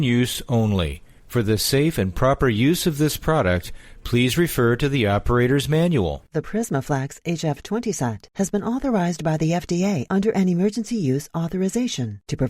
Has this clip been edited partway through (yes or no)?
yes